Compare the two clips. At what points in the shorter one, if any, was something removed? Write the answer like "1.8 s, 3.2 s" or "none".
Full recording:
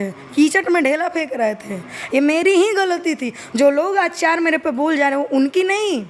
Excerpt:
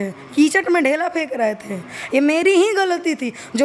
none